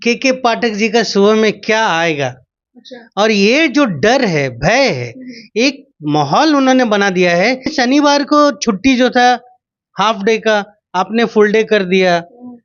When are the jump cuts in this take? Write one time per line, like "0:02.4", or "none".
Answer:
0:07.7